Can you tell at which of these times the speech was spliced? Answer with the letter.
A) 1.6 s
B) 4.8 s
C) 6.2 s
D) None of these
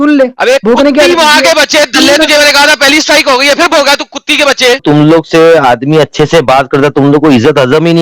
B